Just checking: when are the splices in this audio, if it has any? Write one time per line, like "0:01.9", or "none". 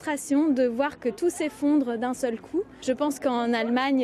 0:02.5